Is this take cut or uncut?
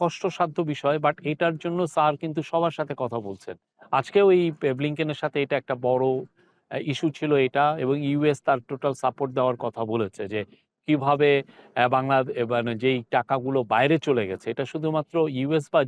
uncut